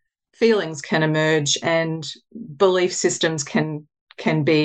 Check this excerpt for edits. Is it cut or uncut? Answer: uncut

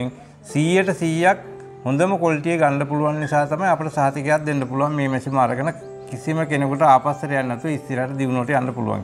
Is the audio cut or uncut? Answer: uncut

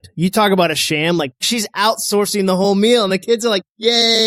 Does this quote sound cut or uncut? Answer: cut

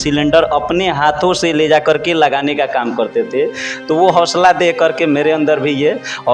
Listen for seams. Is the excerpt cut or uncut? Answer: uncut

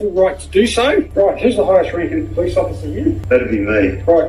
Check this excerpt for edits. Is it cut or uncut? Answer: cut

